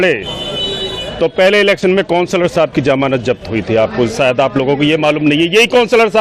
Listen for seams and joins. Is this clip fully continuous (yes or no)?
yes